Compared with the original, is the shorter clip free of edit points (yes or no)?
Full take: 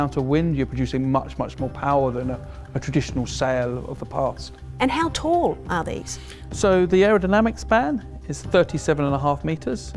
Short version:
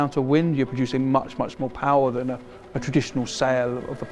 yes